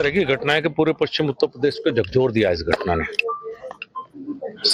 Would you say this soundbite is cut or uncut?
uncut